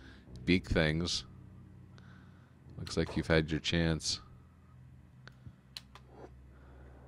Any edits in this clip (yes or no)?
no